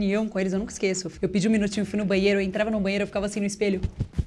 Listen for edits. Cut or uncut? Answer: cut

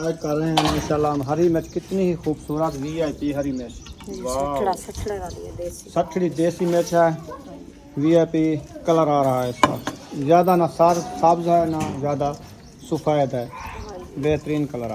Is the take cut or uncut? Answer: uncut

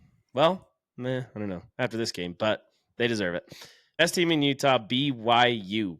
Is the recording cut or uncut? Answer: cut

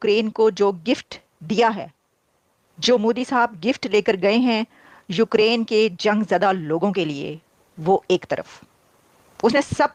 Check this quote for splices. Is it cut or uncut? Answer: uncut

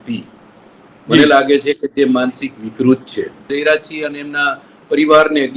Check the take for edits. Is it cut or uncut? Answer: cut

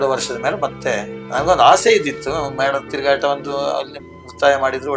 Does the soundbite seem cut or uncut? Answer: cut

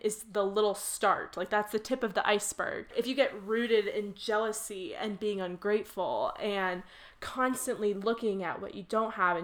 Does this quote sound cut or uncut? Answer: cut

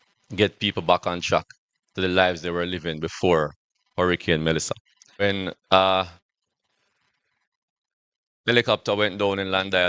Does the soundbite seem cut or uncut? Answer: uncut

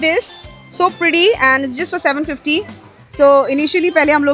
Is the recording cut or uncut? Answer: cut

